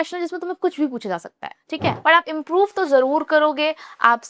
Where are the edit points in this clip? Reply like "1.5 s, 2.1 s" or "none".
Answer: 2.0 s